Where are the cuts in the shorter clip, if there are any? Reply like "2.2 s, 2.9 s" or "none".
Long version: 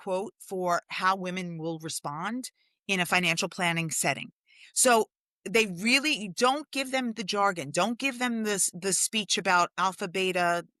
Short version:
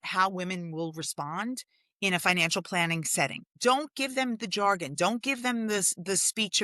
3.5 s